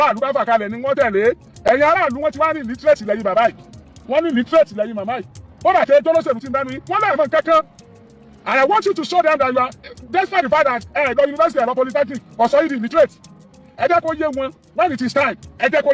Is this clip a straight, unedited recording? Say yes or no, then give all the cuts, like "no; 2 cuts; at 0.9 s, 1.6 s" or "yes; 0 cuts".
yes; 0 cuts